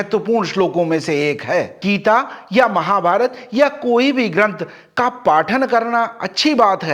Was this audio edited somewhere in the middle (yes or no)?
yes